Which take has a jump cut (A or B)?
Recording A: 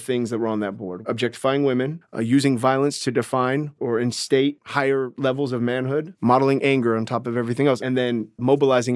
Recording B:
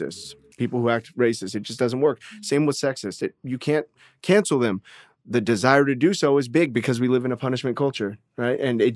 A